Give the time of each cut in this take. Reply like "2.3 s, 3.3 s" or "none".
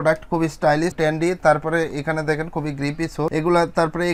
none